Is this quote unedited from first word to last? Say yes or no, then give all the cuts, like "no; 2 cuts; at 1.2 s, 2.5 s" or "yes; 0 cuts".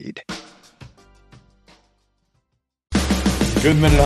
no; 1 cut; at 2.7 s